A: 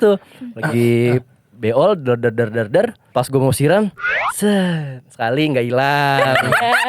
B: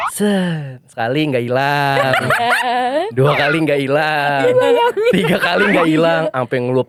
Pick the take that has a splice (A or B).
A